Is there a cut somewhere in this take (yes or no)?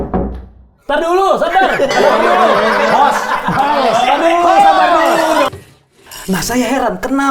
yes